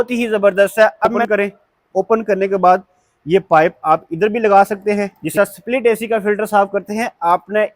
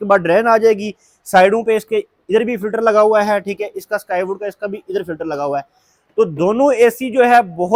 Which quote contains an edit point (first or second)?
first